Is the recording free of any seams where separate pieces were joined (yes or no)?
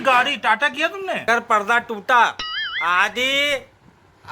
no